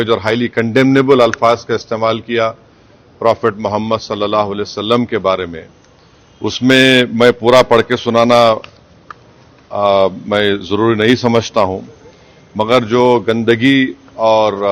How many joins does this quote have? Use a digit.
0